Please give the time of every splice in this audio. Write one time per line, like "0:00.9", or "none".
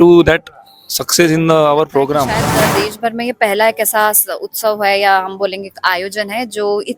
0:02.4